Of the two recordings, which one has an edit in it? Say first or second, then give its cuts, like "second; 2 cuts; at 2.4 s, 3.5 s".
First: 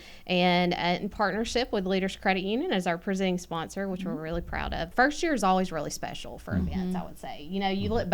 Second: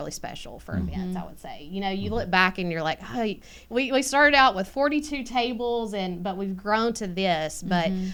first; 1 cut; at 4.9 s